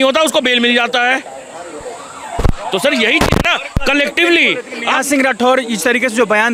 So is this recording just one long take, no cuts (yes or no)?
yes